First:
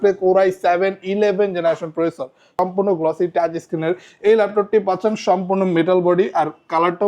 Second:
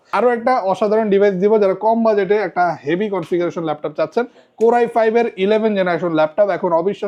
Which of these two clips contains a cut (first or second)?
first